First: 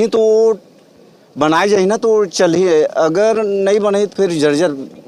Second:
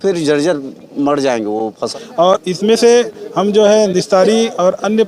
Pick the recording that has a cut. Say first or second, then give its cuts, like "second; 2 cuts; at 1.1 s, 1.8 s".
second; 1 cut; at 1.9 s